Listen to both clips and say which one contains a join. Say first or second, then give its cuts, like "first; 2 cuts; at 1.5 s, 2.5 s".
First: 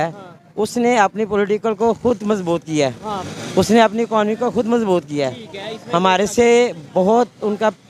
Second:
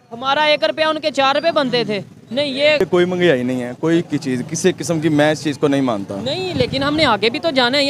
second; 1 cut; at 2.8 s